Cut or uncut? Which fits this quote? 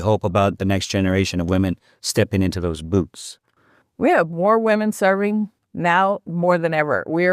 uncut